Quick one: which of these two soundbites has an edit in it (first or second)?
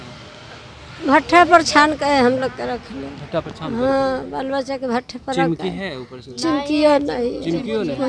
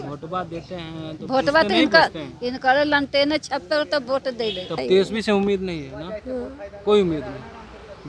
second